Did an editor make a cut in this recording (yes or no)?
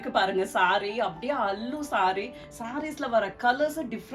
no